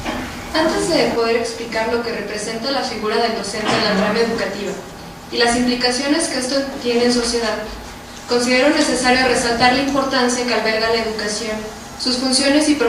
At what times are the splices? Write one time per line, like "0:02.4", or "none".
0:06.2